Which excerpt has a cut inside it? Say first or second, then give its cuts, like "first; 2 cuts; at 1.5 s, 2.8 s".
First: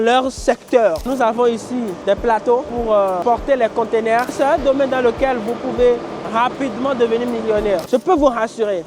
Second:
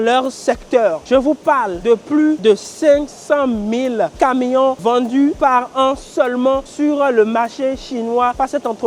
first; 3 cuts; at 1.0 s, 4.3 s, 7.8 s